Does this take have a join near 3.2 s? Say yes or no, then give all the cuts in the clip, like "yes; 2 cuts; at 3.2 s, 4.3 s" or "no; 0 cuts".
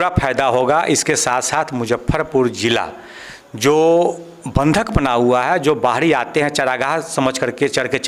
no; 0 cuts